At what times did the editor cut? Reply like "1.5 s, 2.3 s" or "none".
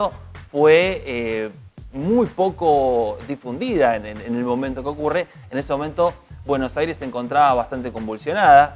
none